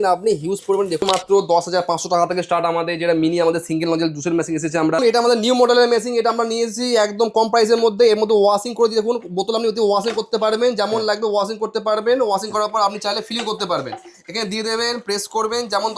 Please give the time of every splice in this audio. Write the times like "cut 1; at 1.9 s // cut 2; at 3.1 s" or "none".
cut 1; at 1.0 s // cut 2; at 5.0 s